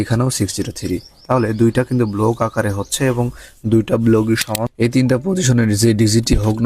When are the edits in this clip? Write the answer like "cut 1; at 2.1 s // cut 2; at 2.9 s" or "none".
cut 1; at 4.6 s